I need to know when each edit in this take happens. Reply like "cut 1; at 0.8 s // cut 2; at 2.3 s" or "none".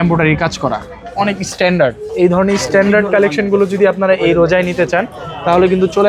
none